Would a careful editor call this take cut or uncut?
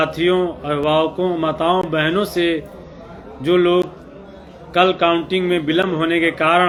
uncut